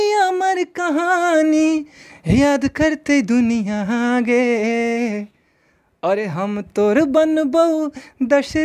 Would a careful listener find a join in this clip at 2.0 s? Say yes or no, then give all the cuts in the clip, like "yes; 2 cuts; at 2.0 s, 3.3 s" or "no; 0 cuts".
no; 0 cuts